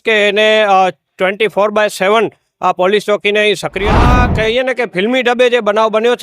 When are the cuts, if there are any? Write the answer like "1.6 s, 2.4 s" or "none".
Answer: 4.0 s